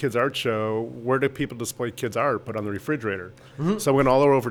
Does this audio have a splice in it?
no; 0 cuts

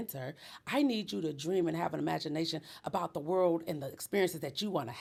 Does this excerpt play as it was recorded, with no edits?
yes; 0 cuts

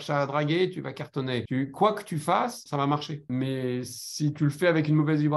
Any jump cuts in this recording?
yes; 2 cuts; at 1.5 s, 3.1 s

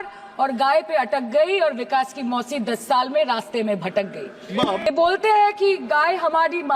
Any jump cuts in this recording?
yes; 1 cut; at 4.9 s

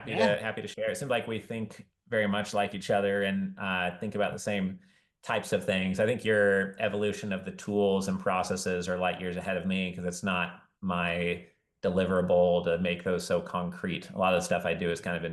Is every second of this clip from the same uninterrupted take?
yes; 0 cuts

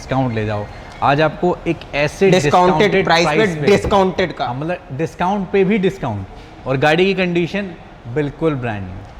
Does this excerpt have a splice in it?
no; 0 cuts

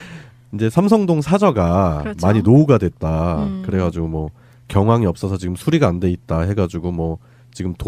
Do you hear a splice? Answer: no; 0 cuts

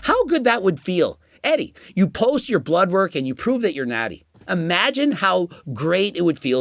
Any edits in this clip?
no; 0 cuts

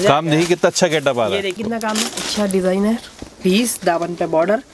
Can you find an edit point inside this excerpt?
yes; 1 cut; at 1.6 s

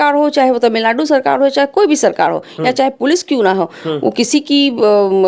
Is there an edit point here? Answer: no; 0 cuts

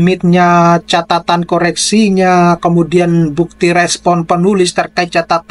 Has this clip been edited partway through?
no; 0 cuts

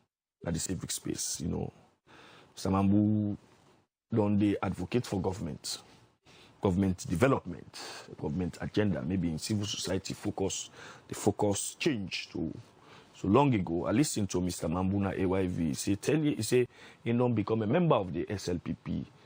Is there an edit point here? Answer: no; 0 cuts

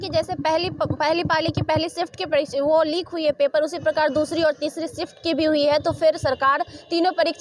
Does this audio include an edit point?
no; 0 cuts

